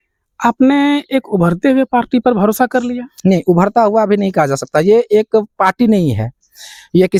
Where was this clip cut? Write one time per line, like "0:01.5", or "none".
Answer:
none